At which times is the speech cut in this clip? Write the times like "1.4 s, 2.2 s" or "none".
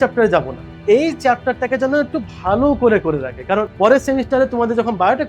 0.8 s, 3.7 s

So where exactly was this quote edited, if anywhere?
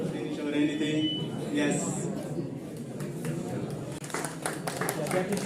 4.0 s

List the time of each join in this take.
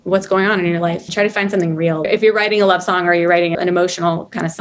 1.1 s, 2.1 s, 3.5 s

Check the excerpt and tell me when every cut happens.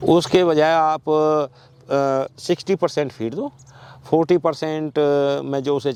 none

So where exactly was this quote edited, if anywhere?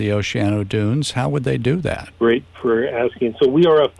2.1 s

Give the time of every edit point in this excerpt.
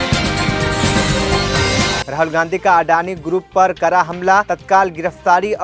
2.0 s

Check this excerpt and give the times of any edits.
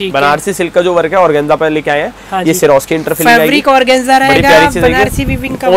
none

